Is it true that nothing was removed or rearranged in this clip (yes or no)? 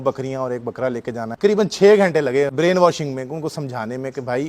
no